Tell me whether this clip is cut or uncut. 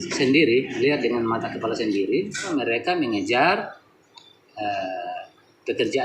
cut